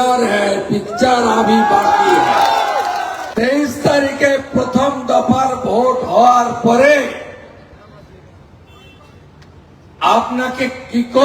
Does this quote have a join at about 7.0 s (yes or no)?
no